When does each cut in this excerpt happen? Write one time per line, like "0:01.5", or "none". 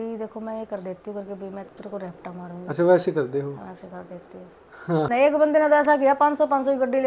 0:05.1